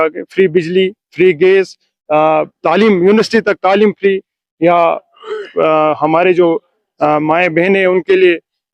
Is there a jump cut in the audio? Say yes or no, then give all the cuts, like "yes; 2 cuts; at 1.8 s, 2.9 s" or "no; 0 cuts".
no; 0 cuts